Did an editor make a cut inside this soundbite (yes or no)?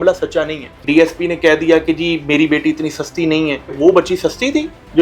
yes